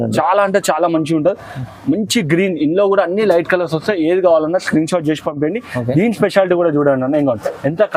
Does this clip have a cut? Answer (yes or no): no